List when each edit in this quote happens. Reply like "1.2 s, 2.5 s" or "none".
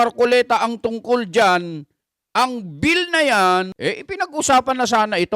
3.7 s

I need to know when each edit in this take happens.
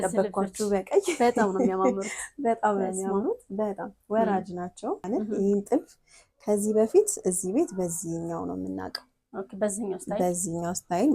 5.0 s

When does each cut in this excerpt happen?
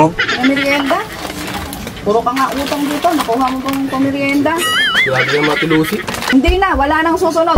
6.3 s

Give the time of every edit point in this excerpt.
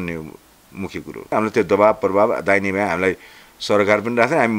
1.3 s

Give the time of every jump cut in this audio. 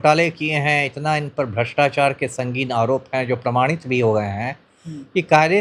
none

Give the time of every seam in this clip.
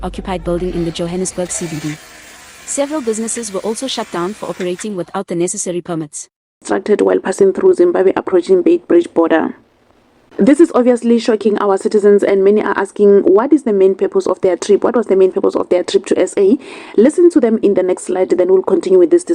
6.6 s

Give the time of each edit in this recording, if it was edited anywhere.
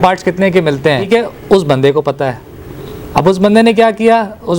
1.1 s

